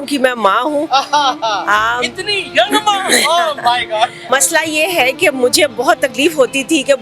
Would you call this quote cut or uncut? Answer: cut